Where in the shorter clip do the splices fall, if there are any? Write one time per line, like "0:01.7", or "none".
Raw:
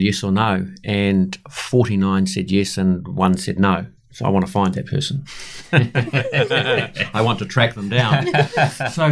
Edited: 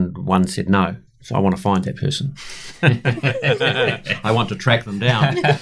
none

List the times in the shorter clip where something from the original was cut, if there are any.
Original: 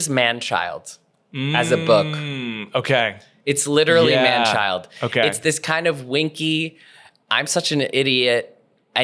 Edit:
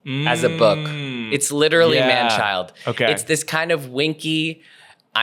0:01.1

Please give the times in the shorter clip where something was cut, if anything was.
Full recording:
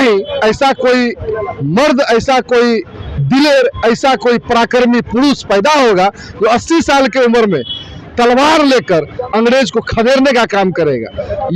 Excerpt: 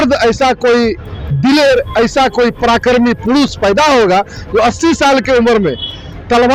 none

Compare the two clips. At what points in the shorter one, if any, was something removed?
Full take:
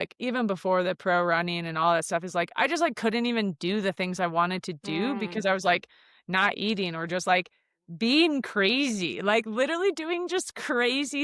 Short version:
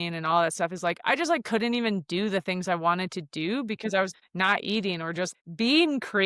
0:04.1
0:05.3

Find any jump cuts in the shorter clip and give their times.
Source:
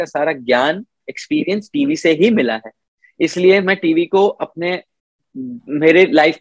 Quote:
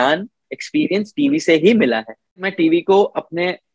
0:02.5

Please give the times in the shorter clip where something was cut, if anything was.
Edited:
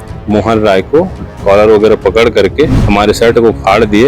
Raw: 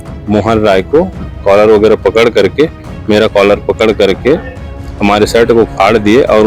0:02.8

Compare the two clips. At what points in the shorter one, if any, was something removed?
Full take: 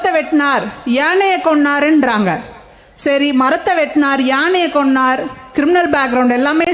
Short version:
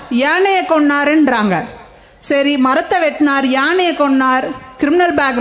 none

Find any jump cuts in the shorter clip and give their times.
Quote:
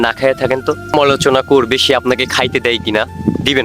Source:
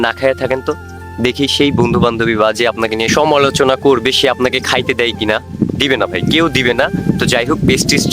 0:00.9

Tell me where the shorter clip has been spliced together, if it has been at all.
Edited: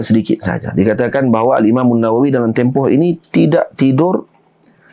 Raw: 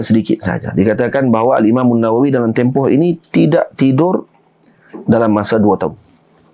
none

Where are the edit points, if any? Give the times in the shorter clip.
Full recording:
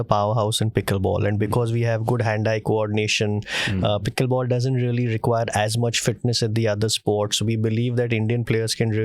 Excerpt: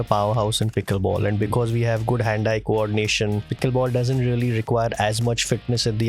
0:03.5

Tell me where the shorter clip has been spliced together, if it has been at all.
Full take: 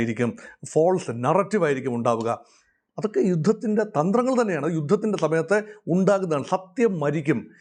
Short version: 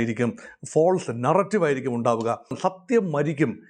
0:02.6

